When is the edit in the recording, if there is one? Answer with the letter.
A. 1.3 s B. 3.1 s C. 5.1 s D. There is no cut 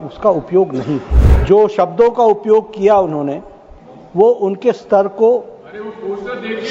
A